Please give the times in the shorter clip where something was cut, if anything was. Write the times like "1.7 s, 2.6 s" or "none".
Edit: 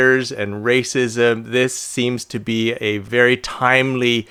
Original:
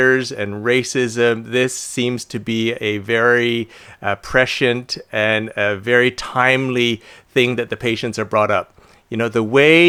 3.0 s